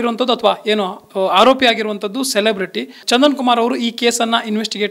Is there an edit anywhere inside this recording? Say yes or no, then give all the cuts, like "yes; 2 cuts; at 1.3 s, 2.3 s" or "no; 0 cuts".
yes; 1 cut; at 3.0 s